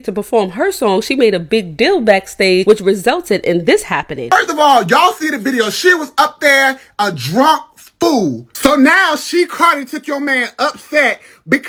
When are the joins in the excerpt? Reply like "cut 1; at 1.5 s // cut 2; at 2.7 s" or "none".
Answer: none